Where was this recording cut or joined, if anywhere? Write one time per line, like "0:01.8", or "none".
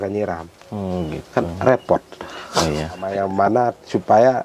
0:03.1

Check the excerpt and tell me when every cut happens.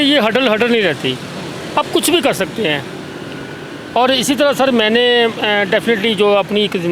none

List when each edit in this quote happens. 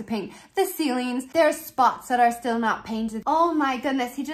0:01.3
0:03.2

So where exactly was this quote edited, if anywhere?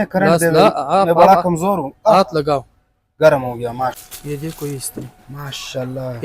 0:04.1

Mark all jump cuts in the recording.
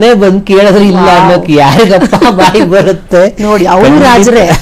none

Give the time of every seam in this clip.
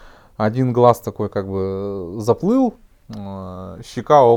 none

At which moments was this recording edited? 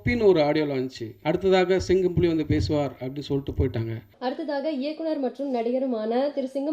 0:01.1
0:04.0

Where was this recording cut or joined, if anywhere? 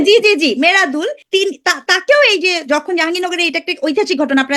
0:01.2

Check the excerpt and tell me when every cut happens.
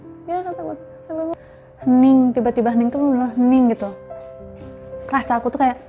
0:01.3

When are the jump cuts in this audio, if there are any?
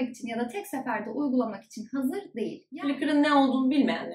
0:02.6

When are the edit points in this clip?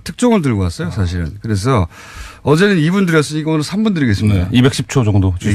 0:04.4

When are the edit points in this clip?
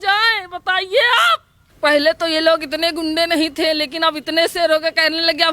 0:01.7

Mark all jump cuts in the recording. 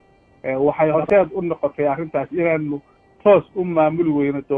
0:01.0

